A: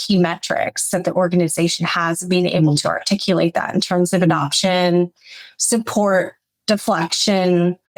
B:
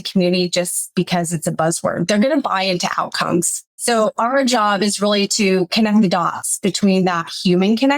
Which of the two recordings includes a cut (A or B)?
B